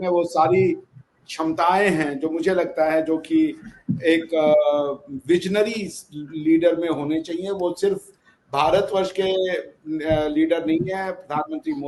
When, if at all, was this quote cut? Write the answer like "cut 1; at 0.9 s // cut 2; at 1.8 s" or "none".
none